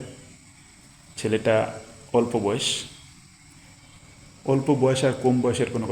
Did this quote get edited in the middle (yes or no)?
no